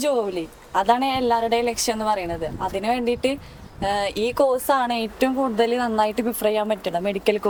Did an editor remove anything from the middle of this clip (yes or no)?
no